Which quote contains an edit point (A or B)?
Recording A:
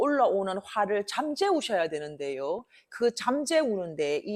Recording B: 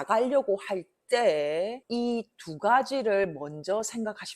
B